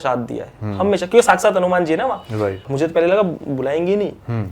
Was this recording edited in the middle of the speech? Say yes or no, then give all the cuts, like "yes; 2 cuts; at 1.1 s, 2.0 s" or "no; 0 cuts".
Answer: yes; 1 cut; at 2.6 s